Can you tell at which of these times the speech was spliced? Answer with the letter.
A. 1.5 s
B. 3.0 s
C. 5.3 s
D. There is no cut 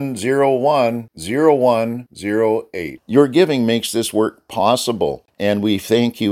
C